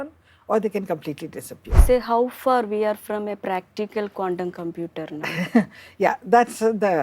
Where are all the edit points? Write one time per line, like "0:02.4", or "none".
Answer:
0:01.8